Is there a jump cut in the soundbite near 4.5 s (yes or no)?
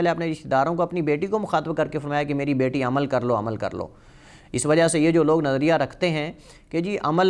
no